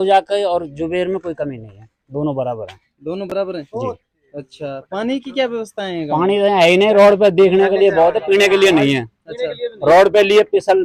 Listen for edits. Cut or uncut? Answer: uncut